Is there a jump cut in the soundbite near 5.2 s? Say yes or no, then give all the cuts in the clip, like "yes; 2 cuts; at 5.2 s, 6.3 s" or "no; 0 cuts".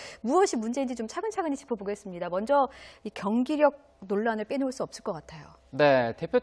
yes; 1 cut; at 5.2 s